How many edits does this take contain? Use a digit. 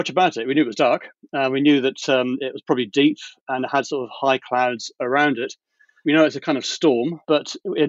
0